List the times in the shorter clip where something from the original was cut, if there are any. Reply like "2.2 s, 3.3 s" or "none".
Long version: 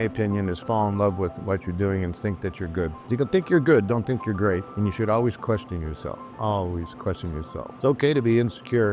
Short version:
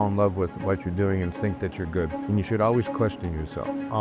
2.2 s

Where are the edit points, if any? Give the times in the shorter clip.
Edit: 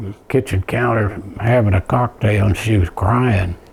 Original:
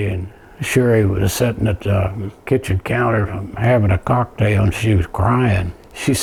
none

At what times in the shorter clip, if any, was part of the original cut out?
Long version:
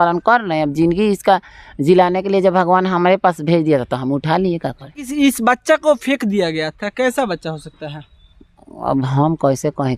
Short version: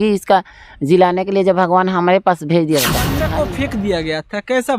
3.2 s

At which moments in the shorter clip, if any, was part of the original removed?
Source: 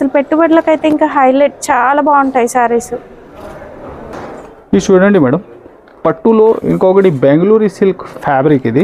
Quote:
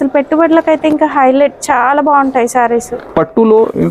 3.0 s

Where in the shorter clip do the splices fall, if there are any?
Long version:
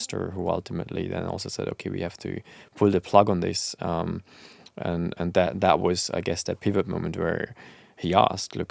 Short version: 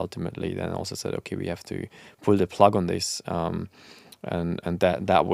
none

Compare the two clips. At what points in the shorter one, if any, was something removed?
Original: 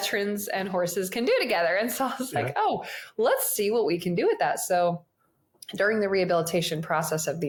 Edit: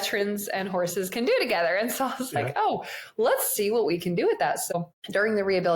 4.6 s

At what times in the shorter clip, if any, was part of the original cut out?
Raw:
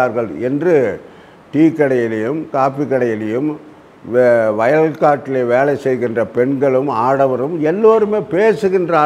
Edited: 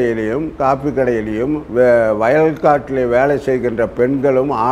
1.6 s

